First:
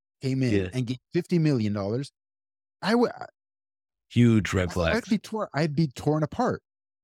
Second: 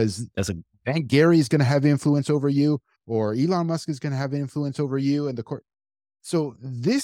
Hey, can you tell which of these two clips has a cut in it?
second; 1 cut; at 2.9 s

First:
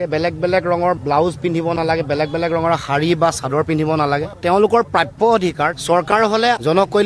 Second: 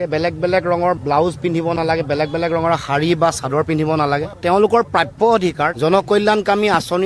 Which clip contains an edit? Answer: second; 1 cut; at 5.8 s

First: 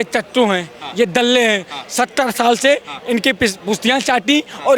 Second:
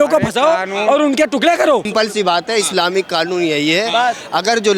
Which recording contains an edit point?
second; 1 cut; at 1.9 s

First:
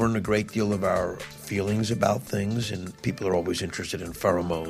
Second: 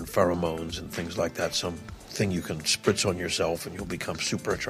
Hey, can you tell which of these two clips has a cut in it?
first; 2 cuts; at 1.3 s, 2.8 s

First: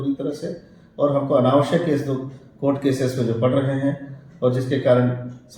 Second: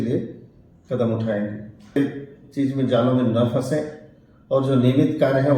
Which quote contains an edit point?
second; 1 cut; at 2.0 s

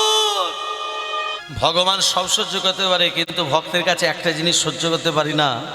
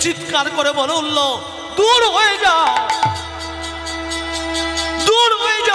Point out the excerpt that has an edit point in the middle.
first; 1 cut; at 1.3 s

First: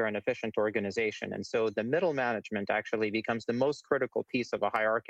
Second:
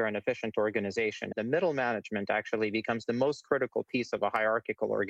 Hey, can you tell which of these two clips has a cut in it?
second; 1 cut; at 1.4 s

